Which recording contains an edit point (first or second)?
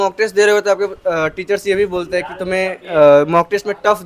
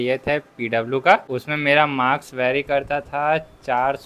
second